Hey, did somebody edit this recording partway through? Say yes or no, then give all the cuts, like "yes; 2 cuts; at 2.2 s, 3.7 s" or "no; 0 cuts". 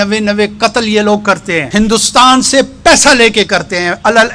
yes; 1 cut; at 1.7 s